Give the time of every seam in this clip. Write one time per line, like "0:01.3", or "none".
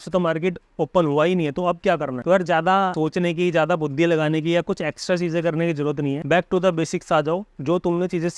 0:02.1
0:02.9
0:06.2